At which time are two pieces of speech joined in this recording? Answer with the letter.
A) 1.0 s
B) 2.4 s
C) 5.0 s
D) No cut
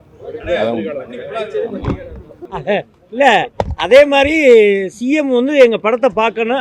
B